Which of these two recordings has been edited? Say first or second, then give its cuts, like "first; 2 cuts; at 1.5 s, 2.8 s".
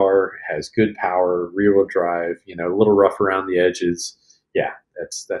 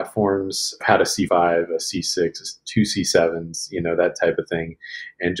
second; 1 cut; at 1.2 s